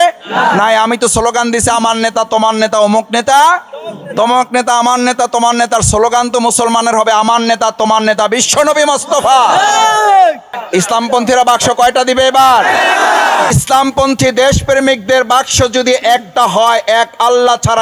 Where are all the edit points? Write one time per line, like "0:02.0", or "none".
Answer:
0:10.5
0:13.5